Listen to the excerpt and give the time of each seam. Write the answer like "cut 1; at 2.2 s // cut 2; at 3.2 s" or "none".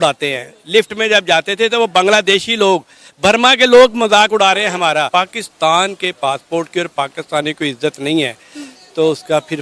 cut 1; at 5.1 s